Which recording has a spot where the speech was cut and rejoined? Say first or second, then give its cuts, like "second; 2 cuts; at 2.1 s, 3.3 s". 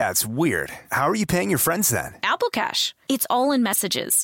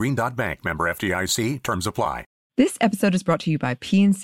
second; 1 cut; at 2.3 s